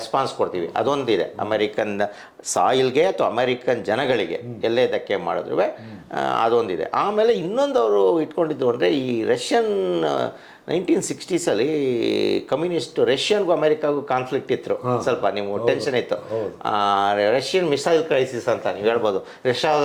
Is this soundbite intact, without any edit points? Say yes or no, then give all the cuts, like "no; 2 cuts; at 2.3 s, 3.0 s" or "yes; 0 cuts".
yes; 0 cuts